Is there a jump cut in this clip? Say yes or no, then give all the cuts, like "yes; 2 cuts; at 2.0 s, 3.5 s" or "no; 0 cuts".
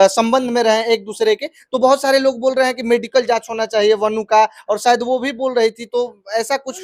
no; 0 cuts